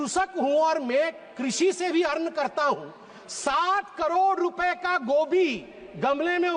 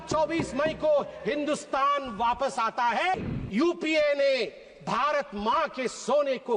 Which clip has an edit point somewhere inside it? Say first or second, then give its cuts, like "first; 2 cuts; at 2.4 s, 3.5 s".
second; 1 cut; at 3.2 s